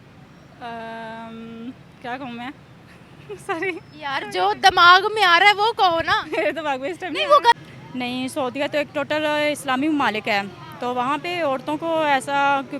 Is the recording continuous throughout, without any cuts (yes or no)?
no